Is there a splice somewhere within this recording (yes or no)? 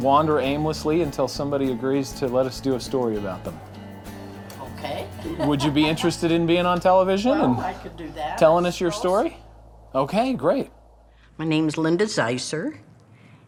no